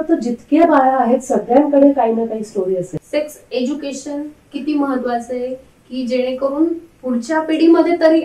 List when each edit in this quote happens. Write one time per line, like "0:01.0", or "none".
0:02.9